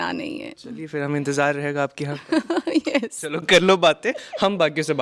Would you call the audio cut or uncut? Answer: uncut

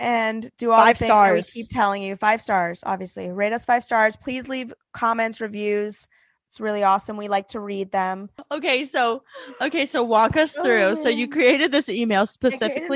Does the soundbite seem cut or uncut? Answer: cut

